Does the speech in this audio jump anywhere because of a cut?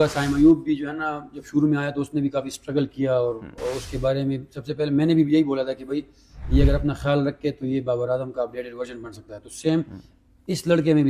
no; 0 cuts

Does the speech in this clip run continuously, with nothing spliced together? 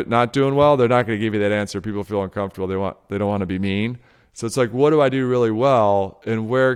yes; 0 cuts

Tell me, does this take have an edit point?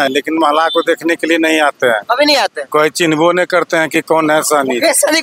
no; 0 cuts

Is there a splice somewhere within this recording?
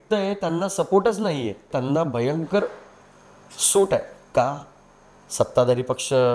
yes; 1 cut; at 1.7 s

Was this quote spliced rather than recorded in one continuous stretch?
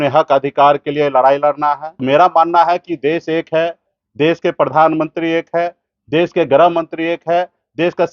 yes; 1 cut; at 1.9 s

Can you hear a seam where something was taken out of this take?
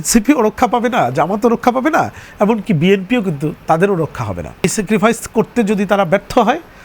yes; 1 cut; at 4.6 s

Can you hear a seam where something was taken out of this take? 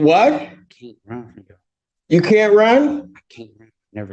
yes; 1 cut; at 1.8 s

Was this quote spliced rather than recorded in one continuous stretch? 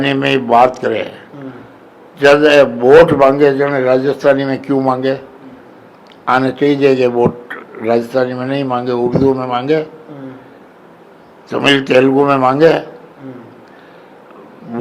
no; 0 cuts

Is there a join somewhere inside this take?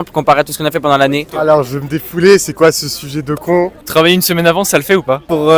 yes; 2 cuts; at 1.2 s, 3.8 s

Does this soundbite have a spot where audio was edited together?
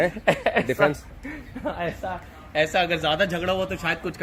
no; 0 cuts

